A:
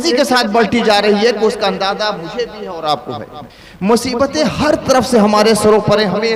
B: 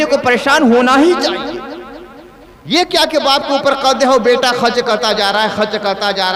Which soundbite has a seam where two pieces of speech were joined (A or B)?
A